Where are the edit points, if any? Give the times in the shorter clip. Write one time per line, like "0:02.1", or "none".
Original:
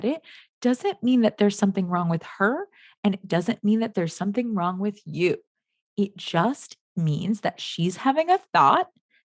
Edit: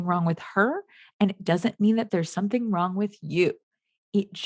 none